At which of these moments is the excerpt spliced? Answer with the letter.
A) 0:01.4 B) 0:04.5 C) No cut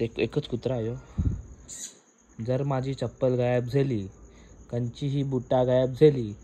C